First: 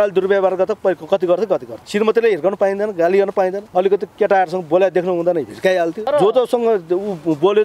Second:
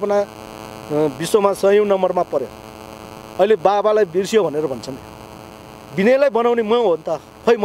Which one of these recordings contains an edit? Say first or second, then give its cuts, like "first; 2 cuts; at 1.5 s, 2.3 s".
first; 3 cuts; at 1.8 s, 3.6 s, 6.0 s